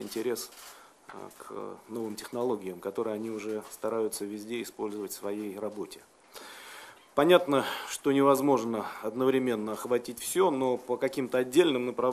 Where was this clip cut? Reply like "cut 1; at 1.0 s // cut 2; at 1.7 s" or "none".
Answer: cut 1; at 2.7 s